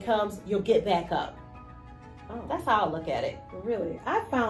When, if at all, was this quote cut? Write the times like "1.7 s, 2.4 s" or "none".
1.9 s